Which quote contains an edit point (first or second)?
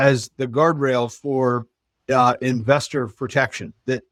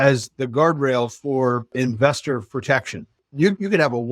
second